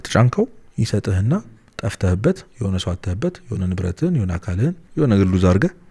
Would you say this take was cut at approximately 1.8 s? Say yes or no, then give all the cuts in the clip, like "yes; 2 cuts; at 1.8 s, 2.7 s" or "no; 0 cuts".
no; 1 cut; at 4.8 s